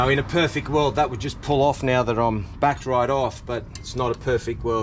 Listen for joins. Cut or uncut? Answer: uncut